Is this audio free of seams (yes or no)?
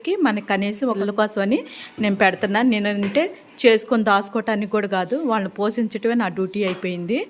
no